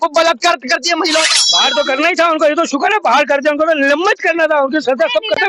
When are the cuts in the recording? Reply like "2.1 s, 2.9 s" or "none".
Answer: 1.3 s